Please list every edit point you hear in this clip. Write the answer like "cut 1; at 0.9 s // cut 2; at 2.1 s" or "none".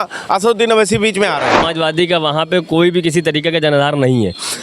cut 1; at 1.6 s